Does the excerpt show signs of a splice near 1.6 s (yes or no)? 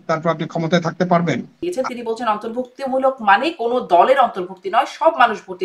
yes